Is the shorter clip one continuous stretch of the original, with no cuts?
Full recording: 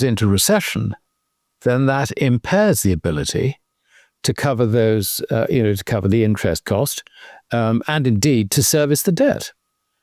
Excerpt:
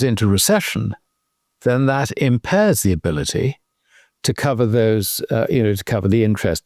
yes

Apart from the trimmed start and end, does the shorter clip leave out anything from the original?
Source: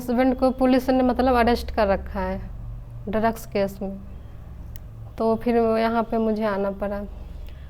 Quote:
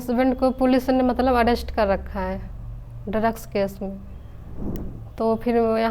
no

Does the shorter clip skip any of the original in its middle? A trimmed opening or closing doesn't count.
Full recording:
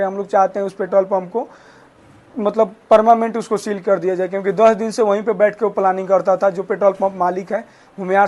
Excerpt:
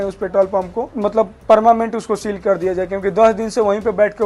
yes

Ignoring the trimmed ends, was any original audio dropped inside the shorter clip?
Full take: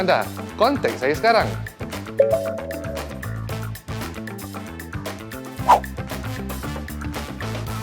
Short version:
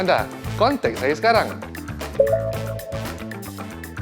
yes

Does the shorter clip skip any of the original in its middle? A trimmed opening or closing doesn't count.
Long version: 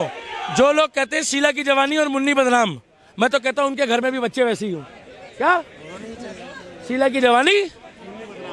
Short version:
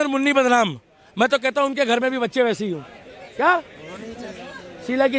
no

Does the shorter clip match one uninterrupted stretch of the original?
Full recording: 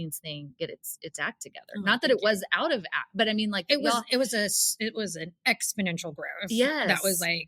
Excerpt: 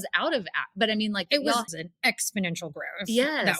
no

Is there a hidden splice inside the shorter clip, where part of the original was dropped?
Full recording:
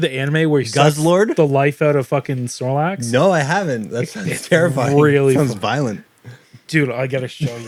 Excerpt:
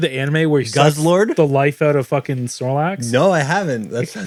no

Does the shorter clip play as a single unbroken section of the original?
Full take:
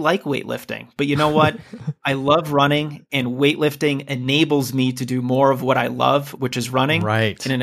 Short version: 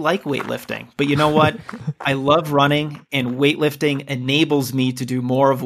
yes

